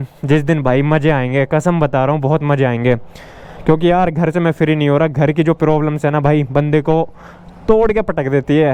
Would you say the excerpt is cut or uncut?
uncut